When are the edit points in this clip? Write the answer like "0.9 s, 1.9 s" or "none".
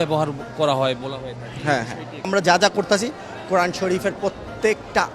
2.3 s